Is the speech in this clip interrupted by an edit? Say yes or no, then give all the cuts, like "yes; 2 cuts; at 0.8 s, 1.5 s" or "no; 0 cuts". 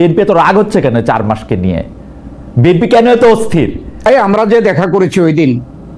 yes; 1 cut; at 4.1 s